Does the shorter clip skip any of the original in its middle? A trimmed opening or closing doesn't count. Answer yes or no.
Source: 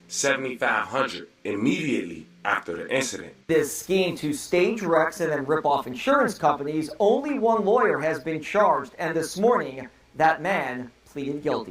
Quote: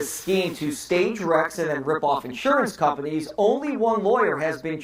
no